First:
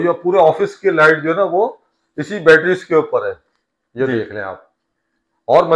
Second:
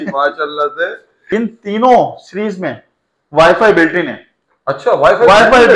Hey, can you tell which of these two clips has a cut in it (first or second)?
second